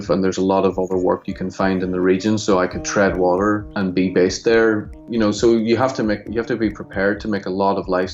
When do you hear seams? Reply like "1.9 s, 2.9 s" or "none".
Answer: 3.7 s, 4.9 s